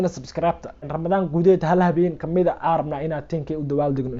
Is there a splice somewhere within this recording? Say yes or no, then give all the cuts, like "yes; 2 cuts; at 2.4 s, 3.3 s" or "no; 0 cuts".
yes; 1 cut; at 0.9 s